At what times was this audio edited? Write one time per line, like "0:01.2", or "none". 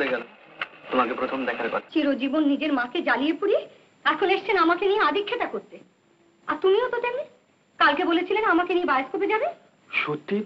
0:01.9